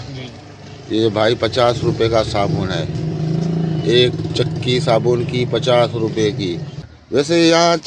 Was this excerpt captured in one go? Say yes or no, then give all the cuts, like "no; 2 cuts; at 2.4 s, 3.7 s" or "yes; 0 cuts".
no; 1 cut; at 7.0 s